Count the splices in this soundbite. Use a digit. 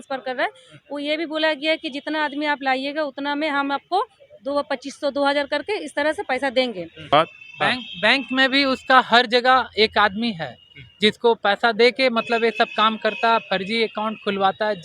1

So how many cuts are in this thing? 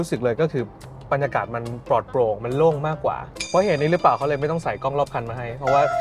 1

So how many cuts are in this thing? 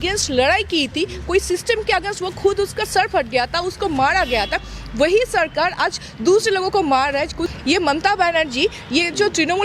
1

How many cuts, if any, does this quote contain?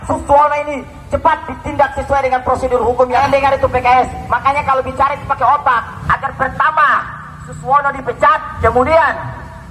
3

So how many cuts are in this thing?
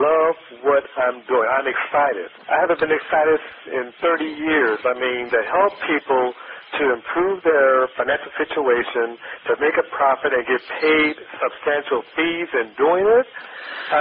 3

